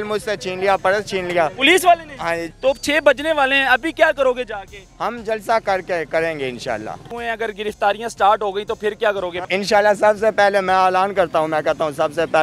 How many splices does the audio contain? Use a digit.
3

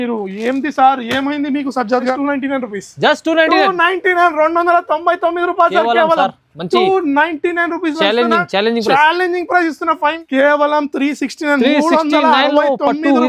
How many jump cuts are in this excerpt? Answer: 2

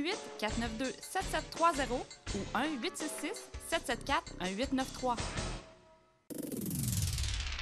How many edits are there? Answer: 1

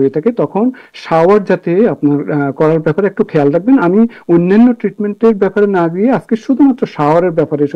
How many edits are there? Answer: 0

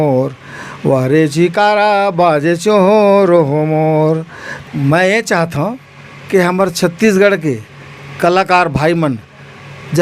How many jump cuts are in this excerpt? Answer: 1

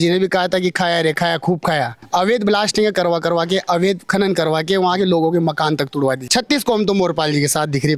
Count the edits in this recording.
2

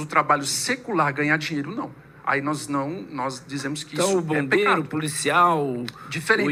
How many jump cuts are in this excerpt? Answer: 0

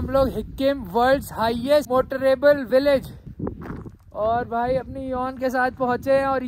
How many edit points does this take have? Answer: 1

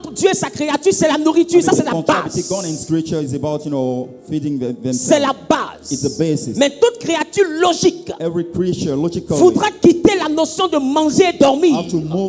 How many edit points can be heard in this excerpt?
0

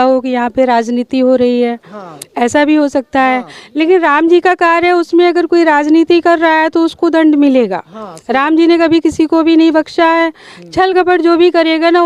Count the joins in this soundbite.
0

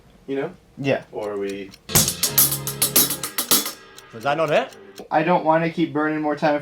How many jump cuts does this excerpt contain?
2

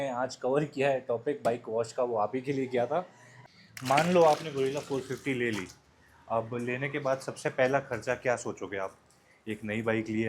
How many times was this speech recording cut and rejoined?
1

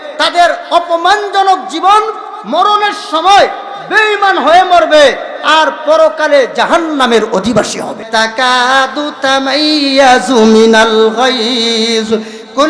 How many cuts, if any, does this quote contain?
1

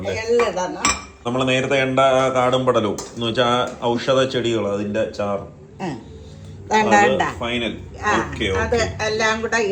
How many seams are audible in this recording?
1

